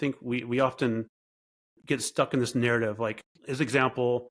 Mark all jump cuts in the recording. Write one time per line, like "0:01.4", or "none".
0:03.3